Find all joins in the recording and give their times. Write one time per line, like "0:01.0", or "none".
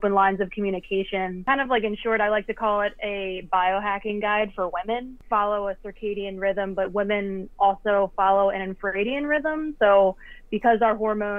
0:01.3
0:05.1